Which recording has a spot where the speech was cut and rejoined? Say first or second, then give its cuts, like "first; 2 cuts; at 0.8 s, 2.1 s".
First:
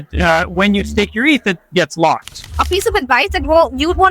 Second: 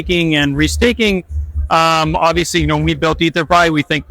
first; 1 cut; at 2.6 s